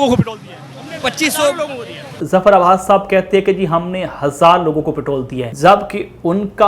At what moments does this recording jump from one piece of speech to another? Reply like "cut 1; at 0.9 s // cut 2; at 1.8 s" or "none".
cut 1; at 5.4 s